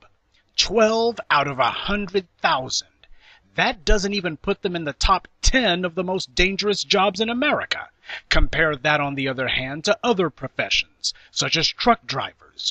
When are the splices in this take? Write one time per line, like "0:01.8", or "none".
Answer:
0:01.0